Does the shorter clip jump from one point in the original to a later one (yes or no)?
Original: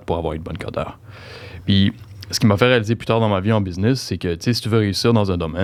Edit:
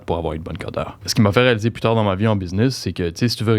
yes